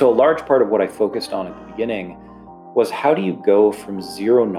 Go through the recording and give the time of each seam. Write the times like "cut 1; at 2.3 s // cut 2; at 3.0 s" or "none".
none